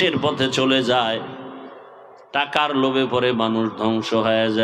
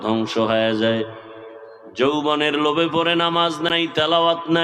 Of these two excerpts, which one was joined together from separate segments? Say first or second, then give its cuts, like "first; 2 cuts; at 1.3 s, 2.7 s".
second; 1 cut; at 3.7 s